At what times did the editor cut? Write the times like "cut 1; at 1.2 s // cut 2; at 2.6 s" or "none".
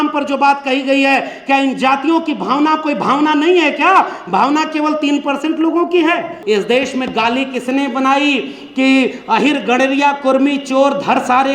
cut 1; at 6.3 s